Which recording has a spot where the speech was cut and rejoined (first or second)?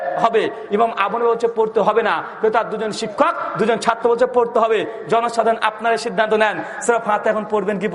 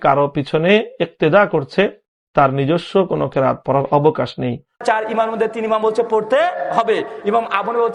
second